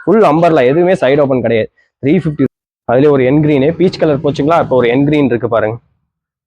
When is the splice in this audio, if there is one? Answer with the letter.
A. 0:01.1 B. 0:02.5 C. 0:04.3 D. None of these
B